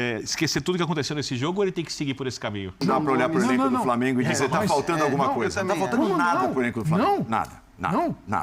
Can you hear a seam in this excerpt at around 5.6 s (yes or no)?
no